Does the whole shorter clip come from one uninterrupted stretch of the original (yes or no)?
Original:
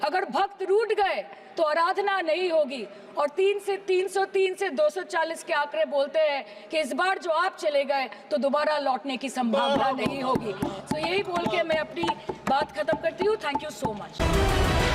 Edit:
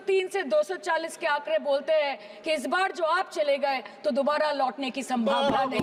yes